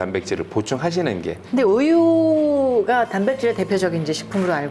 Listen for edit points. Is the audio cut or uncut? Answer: cut